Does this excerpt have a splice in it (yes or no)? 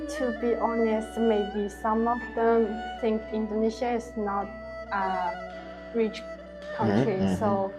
no